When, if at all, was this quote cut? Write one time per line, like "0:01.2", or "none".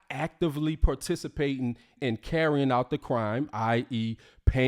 0:02.1

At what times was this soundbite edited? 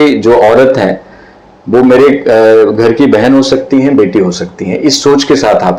none

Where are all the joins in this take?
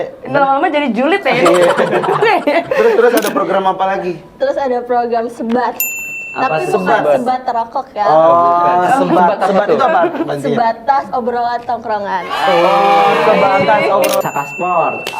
0:14.2

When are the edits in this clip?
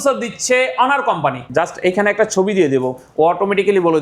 0:01.4

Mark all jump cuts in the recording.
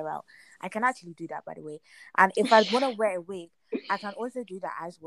none

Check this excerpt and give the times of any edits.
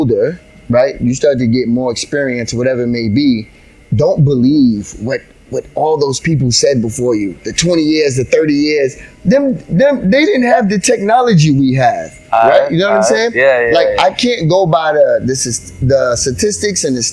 none

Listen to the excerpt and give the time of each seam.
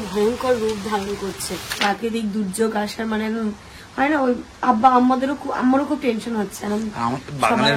0:01.8

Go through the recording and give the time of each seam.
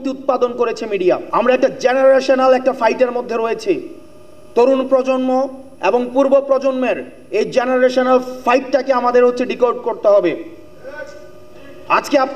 none

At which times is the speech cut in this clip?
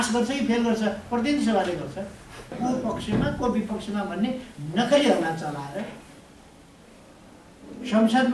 0:02.5

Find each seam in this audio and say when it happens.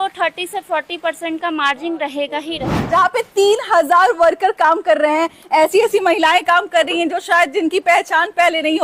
0:02.8

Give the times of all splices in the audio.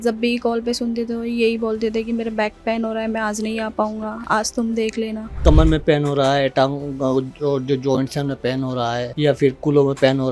0:05.4
0:09.1

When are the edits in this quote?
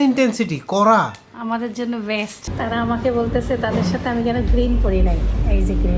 0:01.3
0:02.5

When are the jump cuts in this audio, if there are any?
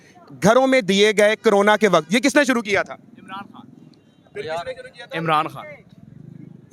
none

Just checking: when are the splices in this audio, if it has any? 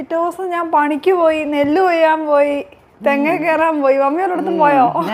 none

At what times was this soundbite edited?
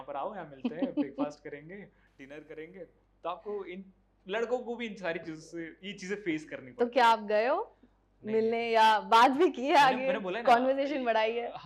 none

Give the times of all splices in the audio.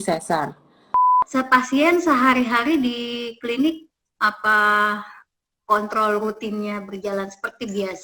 0:01.2

